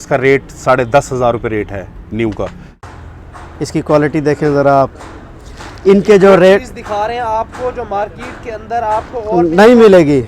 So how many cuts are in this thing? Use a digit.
1